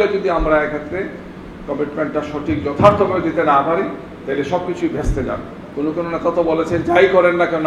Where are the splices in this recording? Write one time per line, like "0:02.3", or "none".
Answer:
0:05.6

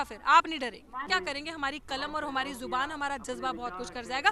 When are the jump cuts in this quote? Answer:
0:01.1

